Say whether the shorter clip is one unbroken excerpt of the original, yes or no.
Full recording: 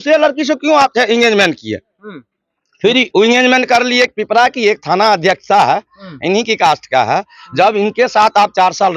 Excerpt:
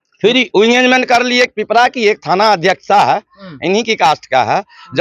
yes